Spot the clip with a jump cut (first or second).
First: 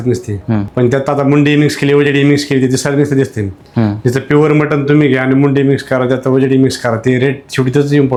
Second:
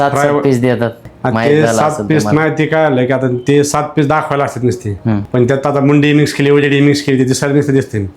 second